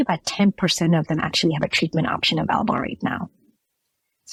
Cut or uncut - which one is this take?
uncut